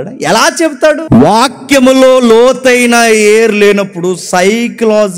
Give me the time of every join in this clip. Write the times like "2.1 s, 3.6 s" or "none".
1.0 s